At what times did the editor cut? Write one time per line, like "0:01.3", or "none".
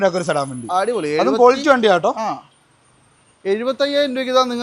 none